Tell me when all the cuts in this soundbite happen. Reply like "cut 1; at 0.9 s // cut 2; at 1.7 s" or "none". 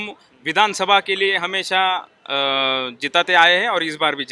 none